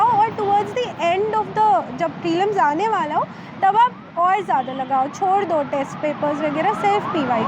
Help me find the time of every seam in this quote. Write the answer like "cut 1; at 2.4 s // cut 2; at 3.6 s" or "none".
none